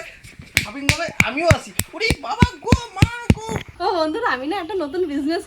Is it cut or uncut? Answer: cut